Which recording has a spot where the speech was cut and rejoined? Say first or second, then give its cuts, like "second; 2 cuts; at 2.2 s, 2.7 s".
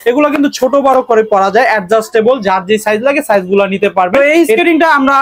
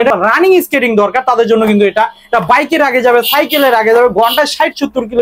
first; 1 cut; at 4.1 s